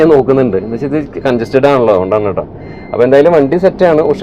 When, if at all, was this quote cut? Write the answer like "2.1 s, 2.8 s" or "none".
none